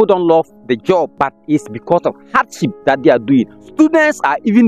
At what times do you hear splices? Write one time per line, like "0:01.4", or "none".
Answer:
0:01.1
0:03.6